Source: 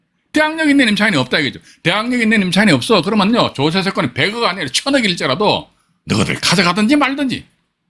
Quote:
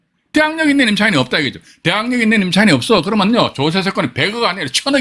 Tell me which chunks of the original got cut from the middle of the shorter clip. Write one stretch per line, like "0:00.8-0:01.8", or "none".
none

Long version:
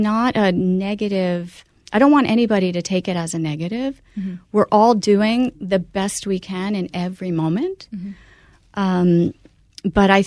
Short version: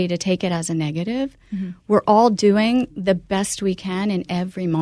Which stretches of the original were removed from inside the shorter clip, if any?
none

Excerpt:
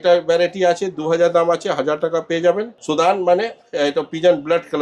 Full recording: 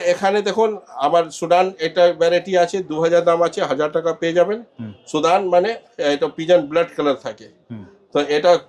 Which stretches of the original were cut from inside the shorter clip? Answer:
0:04.6-0:05.0

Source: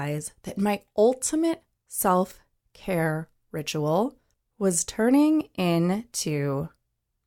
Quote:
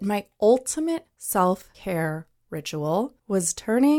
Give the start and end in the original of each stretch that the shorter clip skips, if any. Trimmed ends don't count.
0:01.7-0:01.8
0:02.4-0:02.7
0:04.2-0:04.5

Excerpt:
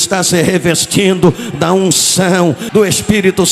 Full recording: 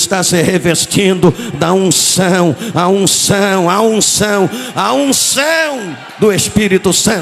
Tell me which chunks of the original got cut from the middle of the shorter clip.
0:02.6-0:06.1

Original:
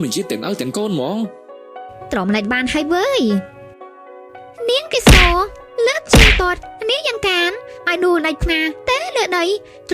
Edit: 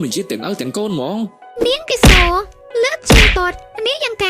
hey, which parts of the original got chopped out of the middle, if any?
0:01.4-0:04.5

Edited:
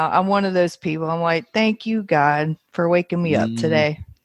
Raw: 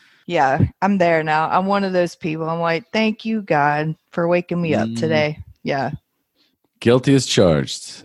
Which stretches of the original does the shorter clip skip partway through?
none

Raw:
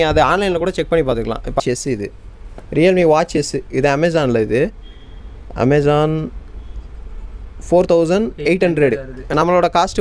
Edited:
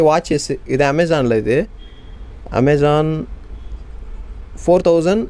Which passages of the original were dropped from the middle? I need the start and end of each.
none

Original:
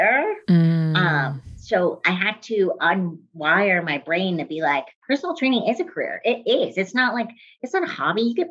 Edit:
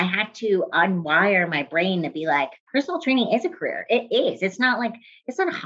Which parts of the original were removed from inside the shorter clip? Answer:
0:03.1-0:03.4

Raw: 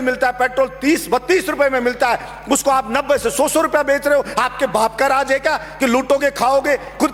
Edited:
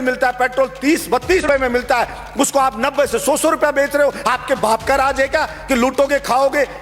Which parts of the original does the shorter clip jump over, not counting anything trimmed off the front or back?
0:01.4-0:01.5

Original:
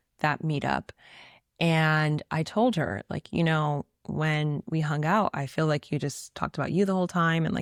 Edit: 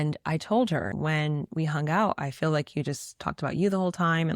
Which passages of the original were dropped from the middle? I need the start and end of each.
0:03.0-0:04.1

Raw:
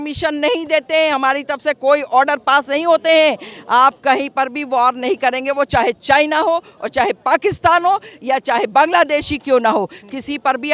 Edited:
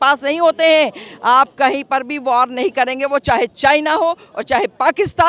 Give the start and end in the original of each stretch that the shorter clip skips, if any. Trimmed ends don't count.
none

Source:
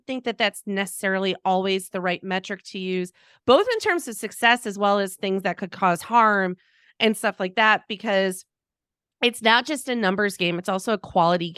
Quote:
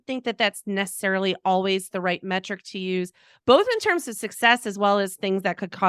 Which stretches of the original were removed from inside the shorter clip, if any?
none

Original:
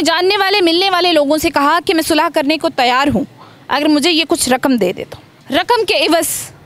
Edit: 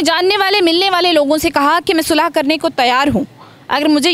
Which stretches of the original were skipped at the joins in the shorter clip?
none

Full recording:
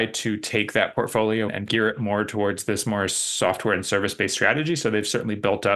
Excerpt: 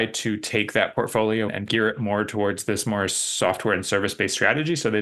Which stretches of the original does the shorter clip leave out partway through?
none

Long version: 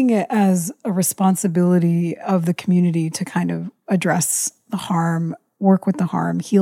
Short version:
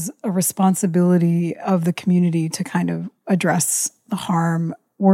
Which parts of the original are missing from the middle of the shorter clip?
none

